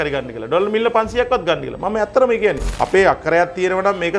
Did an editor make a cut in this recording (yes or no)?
yes